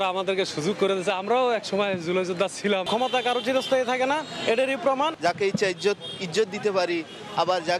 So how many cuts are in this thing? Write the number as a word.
zero